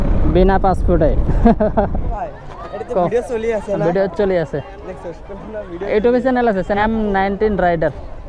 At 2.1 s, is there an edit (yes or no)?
yes